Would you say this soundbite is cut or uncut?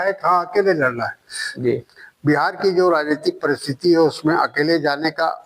cut